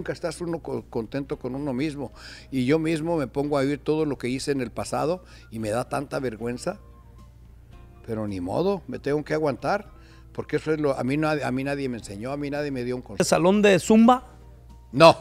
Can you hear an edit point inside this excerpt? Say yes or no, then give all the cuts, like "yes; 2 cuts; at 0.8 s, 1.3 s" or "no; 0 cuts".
yes; 1 cut; at 13.2 s